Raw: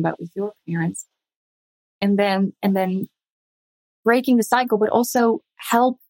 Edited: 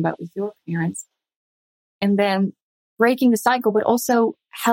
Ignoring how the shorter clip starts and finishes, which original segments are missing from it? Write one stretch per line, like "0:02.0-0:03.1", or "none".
0:02.5-0:03.6